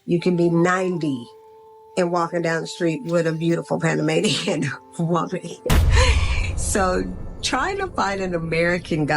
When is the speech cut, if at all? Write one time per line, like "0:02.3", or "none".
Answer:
0:01.2

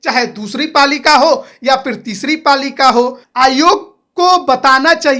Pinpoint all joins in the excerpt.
0:03.2

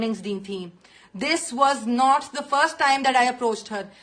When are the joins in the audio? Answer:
none

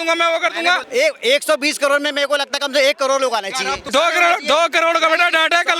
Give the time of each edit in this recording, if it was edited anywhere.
0:00.8
0:03.8

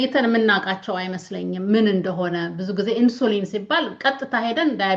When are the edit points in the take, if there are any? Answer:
none

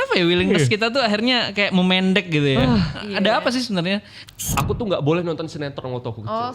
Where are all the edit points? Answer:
0:04.3

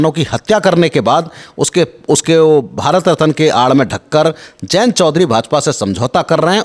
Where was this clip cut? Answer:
none

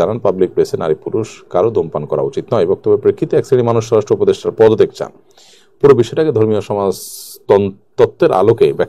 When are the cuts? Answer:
none

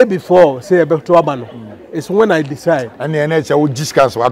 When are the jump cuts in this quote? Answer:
none

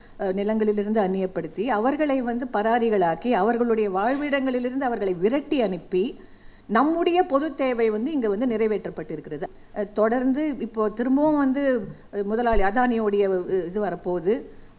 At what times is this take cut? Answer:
0:09.4

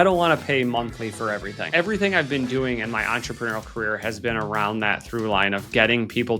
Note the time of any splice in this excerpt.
none

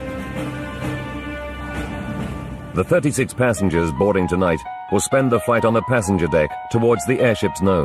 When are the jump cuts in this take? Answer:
0:06.8

